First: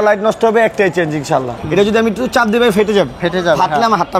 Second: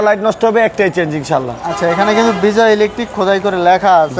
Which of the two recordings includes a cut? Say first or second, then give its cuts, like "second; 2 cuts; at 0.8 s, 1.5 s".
first; 1 cut; at 1.5 s